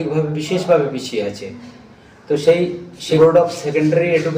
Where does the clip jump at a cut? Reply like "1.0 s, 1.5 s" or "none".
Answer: 3.2 s